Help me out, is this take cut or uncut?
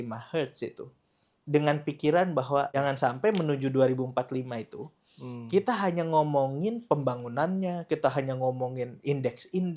cut